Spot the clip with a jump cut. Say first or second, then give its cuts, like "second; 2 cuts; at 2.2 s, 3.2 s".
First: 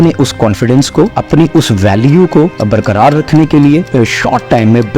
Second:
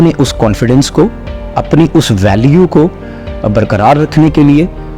first; 3 cuts; at 1.2 s, 2.6 s, 3.9 s